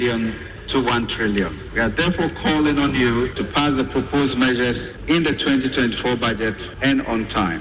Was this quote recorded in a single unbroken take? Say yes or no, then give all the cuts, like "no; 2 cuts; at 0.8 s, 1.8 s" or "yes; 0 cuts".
no; 4 cuts; at 1.6 s, 3.3 s, 4.9 s, 6.7 s